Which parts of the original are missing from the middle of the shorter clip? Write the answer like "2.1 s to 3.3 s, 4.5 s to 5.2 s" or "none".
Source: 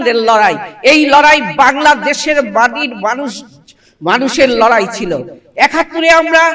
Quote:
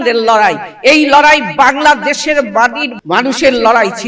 2.9 s to 3.8 s